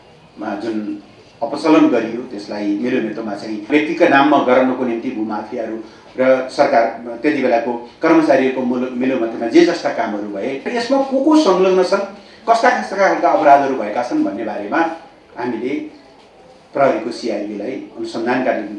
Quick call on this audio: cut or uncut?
cut